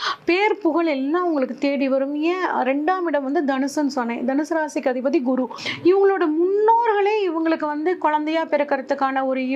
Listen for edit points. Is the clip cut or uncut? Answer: cut